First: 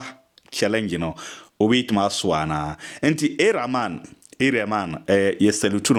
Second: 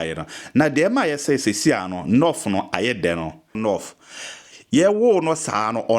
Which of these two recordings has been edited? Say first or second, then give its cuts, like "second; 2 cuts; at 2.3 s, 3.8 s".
second; 1 cut; at 3.6 s